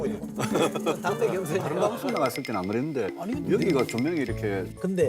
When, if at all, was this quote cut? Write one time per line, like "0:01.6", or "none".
0:01.9

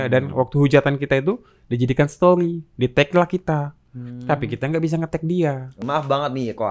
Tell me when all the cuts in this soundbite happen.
0:05.8

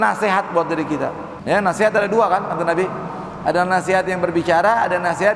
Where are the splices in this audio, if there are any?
0:01.3

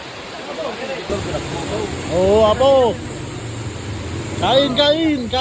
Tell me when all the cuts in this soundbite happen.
0:01.1

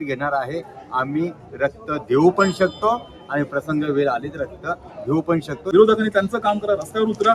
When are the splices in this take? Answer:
0:05.6

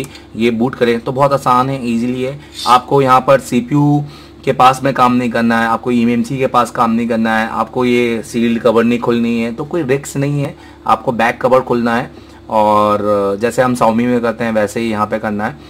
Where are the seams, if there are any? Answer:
none

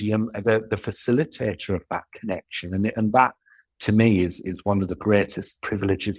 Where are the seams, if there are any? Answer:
none

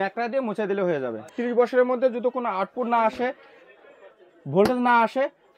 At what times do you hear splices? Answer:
0:01.2

